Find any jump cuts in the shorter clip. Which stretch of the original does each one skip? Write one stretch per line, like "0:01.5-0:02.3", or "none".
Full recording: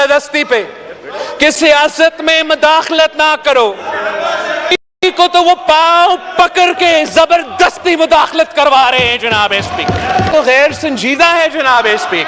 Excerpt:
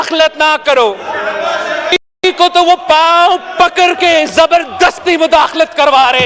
none